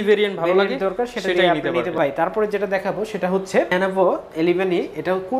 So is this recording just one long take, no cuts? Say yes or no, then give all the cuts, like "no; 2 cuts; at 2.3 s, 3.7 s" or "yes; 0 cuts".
no; 2 cuts; at 1.9 s, 3.7 s